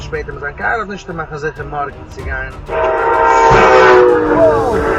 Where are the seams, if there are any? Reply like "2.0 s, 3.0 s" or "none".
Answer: 4.1 s